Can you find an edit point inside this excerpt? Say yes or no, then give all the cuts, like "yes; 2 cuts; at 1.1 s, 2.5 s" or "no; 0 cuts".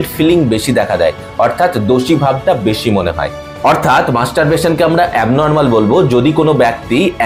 no; 0 cuts